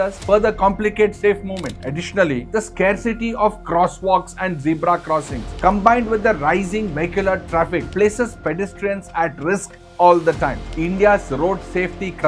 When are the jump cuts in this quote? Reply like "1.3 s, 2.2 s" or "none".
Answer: 10.7 s

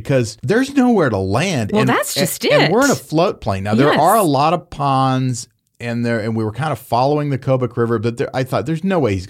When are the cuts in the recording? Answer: none

